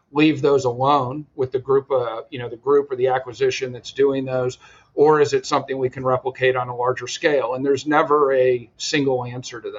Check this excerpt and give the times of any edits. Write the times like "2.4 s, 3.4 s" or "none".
none